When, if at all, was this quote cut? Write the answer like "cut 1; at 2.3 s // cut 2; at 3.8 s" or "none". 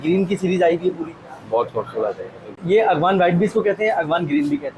cut 1; at 2.5 s